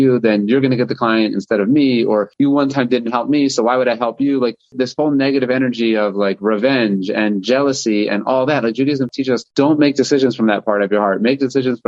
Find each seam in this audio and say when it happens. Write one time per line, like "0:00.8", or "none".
0:02.3